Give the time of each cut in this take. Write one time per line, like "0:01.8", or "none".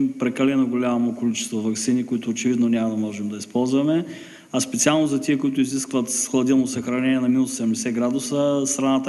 none